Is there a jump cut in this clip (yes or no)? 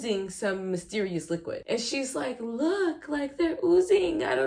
yes